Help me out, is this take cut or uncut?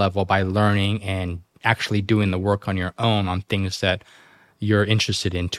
uncut